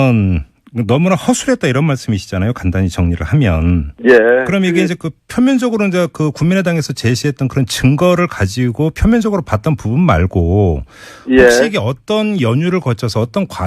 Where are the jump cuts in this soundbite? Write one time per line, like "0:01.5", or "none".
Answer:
0:08.9